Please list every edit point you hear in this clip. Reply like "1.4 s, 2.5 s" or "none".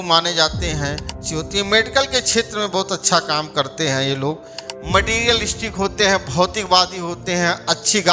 1.2 s, 4.6 s